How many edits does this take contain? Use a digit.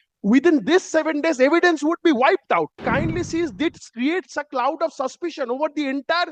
1